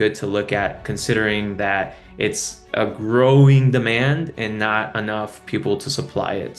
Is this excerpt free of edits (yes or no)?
yes